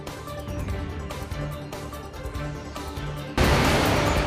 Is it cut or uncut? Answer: cut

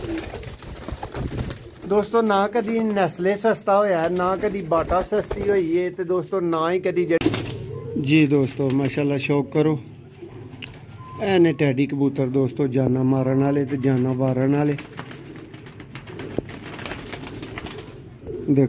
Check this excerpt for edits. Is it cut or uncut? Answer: cut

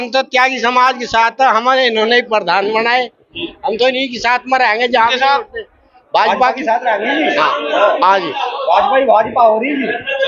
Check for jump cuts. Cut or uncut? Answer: uncut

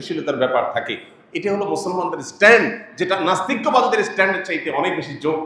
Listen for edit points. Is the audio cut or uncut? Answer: uncut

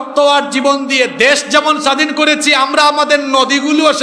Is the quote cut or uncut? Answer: uncut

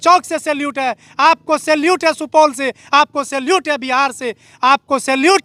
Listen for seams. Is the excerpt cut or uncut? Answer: uncut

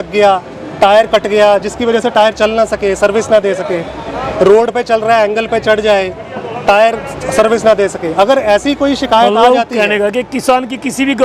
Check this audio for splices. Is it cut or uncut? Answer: uncut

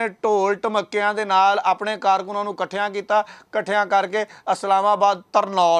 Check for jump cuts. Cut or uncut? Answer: uncut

